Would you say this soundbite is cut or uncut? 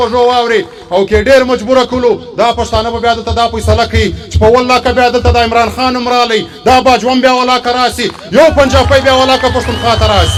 uncut